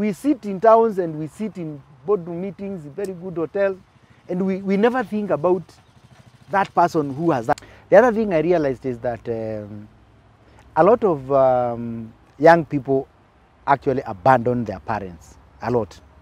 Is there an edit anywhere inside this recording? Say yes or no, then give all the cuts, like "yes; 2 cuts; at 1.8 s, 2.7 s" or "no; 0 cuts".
yes; 1 cut; at 7.5 s